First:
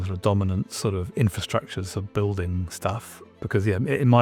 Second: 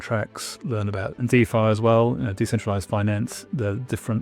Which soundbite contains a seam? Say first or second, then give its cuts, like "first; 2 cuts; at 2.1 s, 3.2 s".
second; 1 cut; at 1.3 s